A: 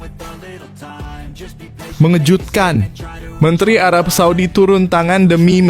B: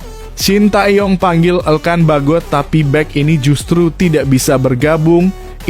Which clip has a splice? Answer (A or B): A